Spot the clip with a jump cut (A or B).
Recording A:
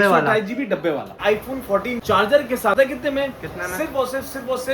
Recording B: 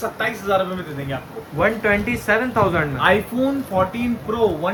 A